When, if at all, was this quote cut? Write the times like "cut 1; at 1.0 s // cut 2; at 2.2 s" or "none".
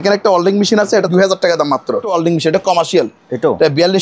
cut 1; at 1.1 s // cut 2; at 2.1 s